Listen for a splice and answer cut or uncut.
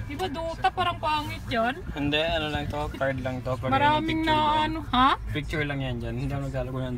uncut